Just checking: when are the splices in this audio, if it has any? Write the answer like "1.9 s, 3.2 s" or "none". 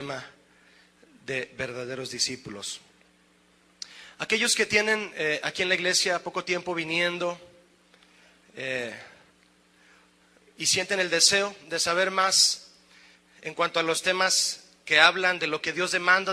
4.6 s